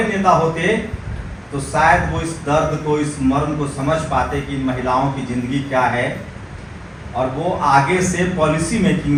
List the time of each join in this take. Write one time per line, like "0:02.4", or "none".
none

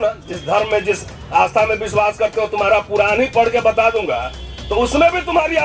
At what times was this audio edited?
none

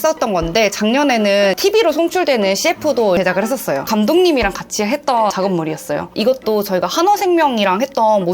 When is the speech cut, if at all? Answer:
0:03.9
0:06.1

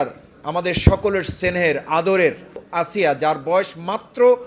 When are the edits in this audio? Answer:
0:02.6

